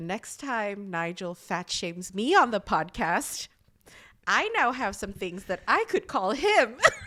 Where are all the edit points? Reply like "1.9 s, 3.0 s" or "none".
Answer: none